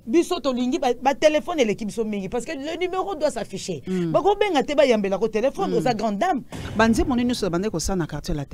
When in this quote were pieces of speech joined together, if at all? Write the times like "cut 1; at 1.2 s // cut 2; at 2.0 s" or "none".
cut 1; at 6.6 s